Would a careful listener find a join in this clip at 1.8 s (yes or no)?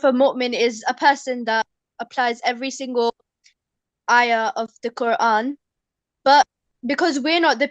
yes